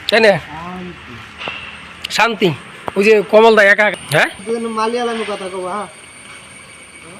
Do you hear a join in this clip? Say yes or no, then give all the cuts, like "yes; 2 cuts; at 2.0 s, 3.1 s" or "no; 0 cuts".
yes; 1 cut; at 3.9 s